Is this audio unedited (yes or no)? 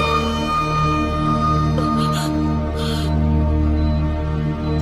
yes